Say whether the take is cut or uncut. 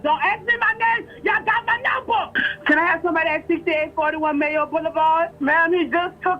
cut